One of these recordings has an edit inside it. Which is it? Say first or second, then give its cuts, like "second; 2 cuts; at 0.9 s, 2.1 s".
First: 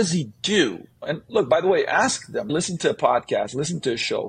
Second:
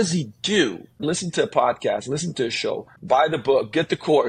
second; 2 cuts; at 0.9 s, 2.9 s